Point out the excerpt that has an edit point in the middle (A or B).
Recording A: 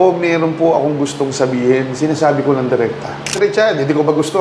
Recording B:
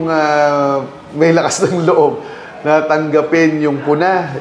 A